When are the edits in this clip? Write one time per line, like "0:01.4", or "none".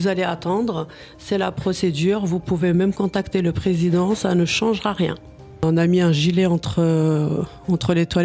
0:05.6